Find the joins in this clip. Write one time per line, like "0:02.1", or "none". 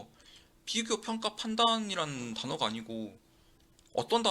none